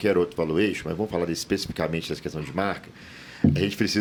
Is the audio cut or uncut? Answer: uncut